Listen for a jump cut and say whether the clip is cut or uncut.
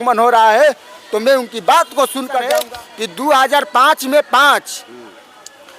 cut